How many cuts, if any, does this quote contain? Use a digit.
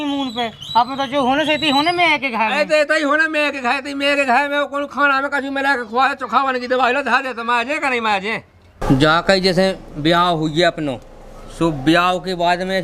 1